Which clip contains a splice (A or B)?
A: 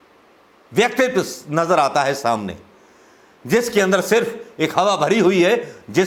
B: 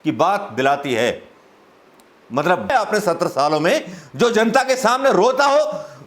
B